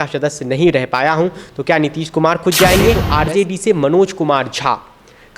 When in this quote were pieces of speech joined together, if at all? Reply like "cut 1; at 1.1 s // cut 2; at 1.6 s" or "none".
cut 1; at 3.0 s